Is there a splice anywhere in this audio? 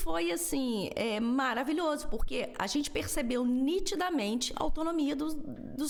no; 0 cuts

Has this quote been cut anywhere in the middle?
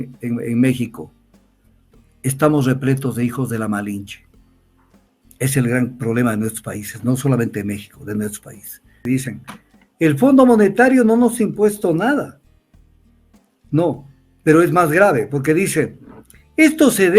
yes; 1 cut; at 9.0 s

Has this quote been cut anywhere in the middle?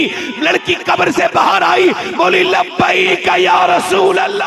no; 0 cuts

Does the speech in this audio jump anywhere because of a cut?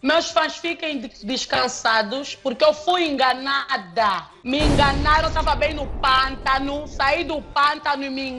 yes; 1 cut; at 4.3 s

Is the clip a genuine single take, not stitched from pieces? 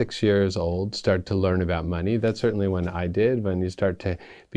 yes; 0 cuts

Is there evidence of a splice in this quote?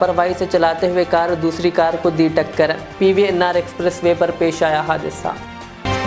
no; 0 cuts

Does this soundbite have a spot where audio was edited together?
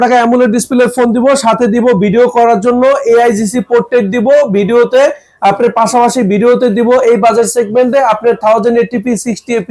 no; 0 cuts

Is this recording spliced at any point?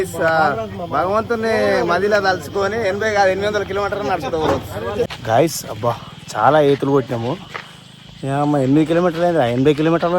yes; 1 cut; at 5.1 s

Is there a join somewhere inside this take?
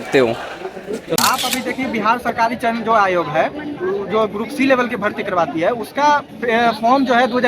yes; 1 cut; at 1.2 s

